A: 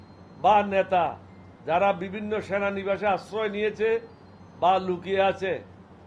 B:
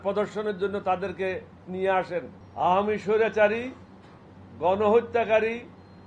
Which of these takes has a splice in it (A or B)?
B